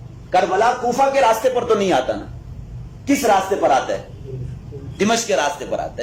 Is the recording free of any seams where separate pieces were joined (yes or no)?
yes